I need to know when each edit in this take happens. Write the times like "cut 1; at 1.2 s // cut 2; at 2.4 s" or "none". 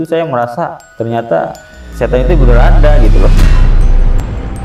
none